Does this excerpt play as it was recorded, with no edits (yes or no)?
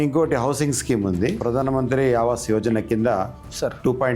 no